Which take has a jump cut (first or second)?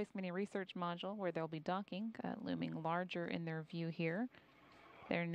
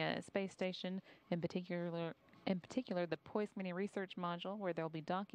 first